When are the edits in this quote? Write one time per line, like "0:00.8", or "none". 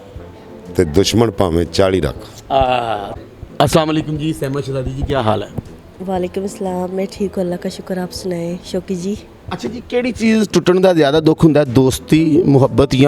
none